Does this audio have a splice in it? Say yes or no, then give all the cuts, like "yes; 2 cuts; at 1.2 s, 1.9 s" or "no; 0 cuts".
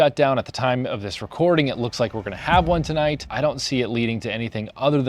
yes; 1 cut; at 3.3 s